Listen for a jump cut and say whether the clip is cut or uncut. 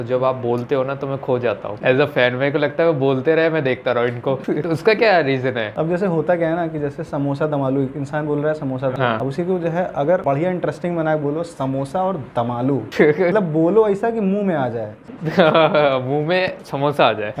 uncut